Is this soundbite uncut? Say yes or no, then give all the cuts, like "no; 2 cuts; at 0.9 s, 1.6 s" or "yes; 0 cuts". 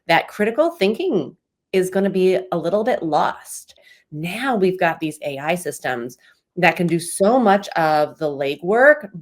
no; 1 cut; at 3.9 s